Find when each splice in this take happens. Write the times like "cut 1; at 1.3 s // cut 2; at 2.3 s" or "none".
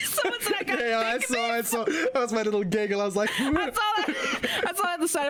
none